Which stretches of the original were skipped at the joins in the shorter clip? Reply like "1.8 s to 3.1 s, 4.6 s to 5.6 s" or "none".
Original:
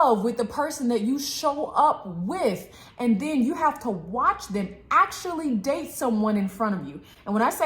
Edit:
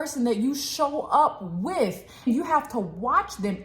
2.9 s to 3.3 s